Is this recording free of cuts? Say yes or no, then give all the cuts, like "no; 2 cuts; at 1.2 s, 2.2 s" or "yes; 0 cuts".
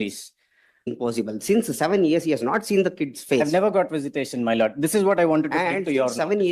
no; 1 cut; at 0.9 s